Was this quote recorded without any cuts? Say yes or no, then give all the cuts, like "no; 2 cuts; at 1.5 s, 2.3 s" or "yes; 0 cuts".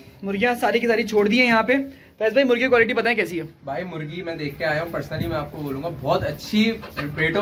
yes; 0 cuts